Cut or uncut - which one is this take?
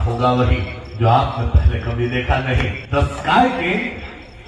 cut